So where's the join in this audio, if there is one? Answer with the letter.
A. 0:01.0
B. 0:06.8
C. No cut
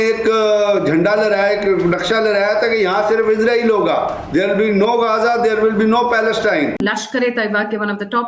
B